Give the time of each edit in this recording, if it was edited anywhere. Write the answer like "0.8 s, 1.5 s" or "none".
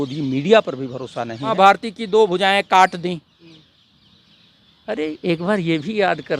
1.4 s